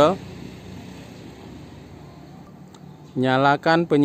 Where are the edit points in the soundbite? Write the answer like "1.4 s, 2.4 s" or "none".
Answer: 2.5 s